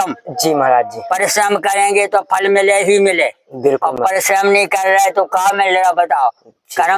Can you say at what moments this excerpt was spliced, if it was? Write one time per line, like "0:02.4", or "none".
none